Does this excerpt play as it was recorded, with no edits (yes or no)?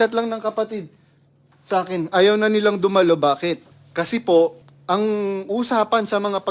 no